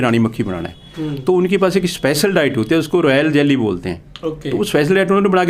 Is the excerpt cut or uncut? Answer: uncut